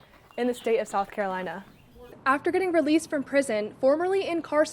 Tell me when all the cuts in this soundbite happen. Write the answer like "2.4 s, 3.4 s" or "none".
2.0 s